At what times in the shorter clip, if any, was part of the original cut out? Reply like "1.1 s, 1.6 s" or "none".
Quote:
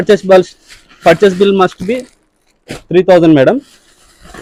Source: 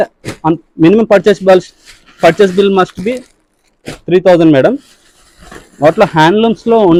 none

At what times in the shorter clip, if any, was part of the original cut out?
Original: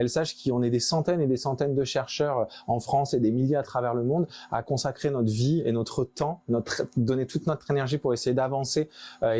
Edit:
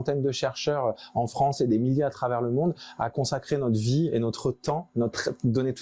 none

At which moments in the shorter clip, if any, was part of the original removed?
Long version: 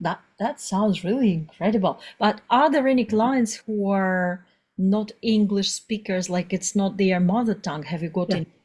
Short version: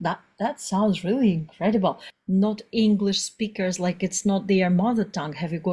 2.1 s

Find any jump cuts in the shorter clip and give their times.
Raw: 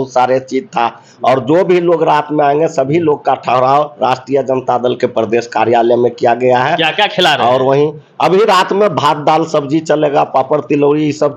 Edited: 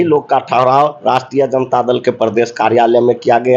none

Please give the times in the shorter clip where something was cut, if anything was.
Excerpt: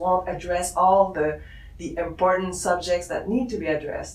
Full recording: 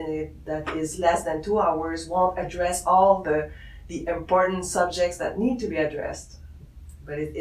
none

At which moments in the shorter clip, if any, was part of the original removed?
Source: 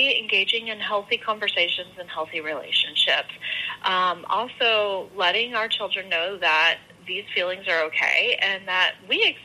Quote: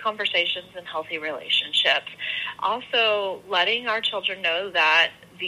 2.5 s

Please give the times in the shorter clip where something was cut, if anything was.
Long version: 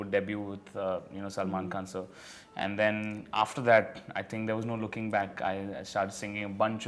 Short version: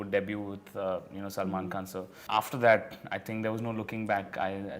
2.2 s

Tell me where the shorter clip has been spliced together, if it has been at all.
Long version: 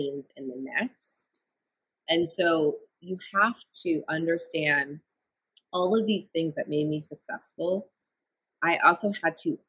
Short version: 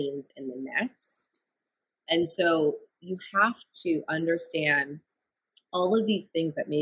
none

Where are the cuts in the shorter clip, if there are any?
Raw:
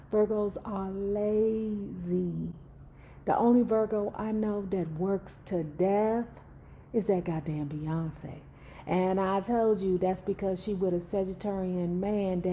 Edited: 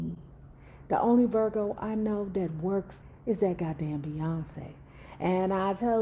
3.0 s

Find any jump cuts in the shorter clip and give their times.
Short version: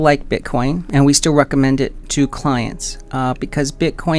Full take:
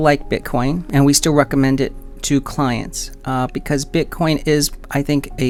2.0 s

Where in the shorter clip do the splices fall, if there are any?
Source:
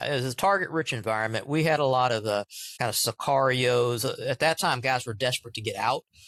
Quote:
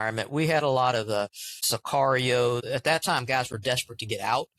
1.5 s, 2.6 s

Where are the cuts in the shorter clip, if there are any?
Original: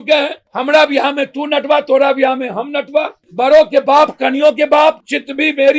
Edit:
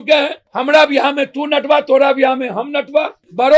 none

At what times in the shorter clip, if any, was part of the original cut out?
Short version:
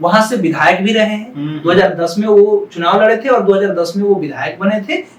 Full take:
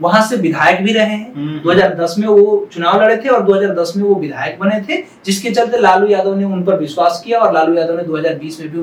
none

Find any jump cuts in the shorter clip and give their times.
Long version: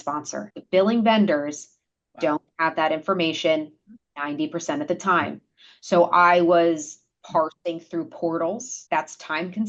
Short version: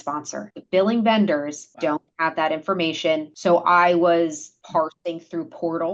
1.6 s, 3.3 s, 4.5 s

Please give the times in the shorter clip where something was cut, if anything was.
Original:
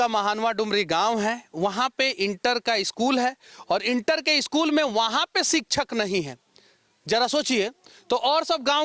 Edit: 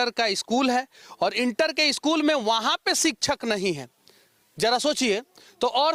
none

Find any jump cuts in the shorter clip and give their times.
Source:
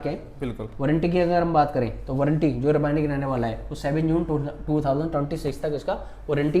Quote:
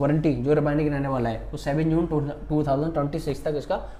none

